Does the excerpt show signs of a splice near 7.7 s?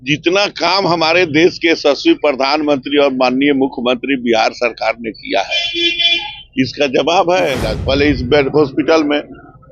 yes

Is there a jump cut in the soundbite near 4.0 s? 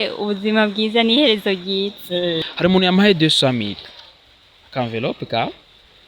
no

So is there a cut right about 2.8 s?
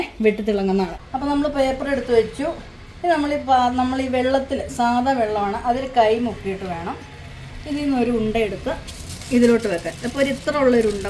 no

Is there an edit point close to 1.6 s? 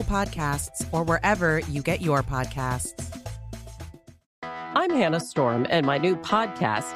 no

